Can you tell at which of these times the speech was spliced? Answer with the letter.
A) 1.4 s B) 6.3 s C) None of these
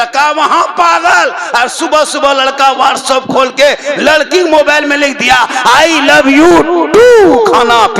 C